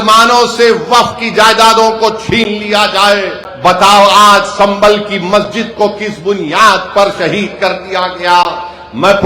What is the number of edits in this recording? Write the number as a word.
one